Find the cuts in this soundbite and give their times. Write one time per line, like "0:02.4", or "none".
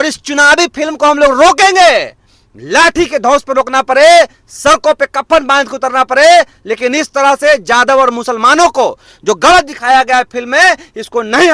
none